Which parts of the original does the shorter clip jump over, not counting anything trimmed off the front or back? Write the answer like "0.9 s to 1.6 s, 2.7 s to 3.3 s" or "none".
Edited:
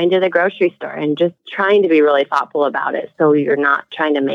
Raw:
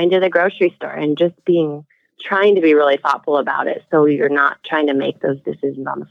1.4 s to 2.1 s